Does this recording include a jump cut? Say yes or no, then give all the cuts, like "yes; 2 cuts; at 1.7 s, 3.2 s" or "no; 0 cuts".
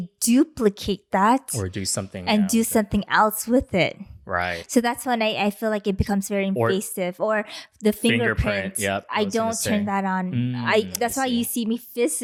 no; 0 cuts